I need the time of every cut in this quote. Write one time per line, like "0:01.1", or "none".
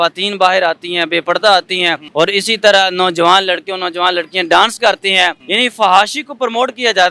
0:02.0
0:05.4